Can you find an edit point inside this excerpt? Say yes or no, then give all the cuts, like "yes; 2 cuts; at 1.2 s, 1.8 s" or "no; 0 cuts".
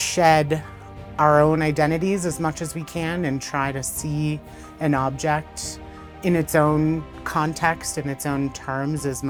no; 0 cuts